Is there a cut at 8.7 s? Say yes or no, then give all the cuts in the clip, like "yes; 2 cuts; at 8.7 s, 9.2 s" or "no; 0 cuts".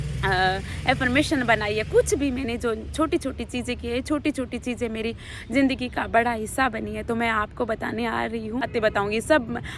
yes; 1 cut; at 8.7 s